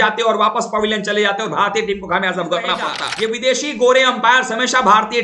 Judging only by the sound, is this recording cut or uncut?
cut